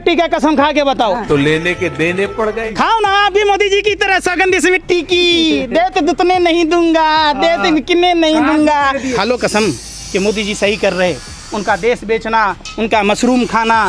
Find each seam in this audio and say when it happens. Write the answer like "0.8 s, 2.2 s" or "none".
1.3 s, 2.7 s, 9.1 s